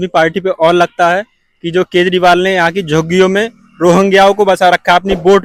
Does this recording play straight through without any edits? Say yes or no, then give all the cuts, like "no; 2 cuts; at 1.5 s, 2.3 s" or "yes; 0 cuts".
yes; 0 cuts